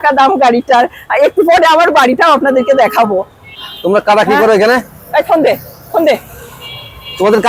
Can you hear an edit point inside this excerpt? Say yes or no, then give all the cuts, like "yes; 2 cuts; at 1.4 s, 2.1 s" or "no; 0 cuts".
yes; 1 cut; at 3.5 s